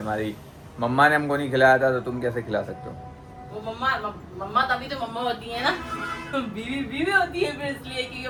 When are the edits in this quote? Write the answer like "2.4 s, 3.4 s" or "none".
none

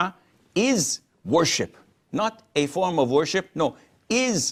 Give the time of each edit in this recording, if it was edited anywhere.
none

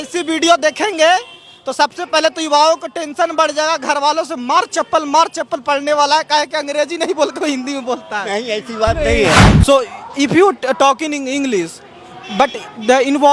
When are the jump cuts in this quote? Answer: 9.5 s

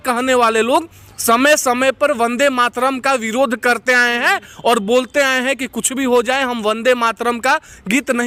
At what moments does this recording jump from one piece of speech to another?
none

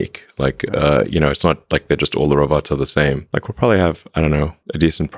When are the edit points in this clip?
3.3 s

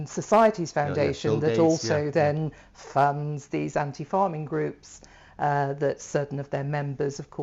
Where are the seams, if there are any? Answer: none

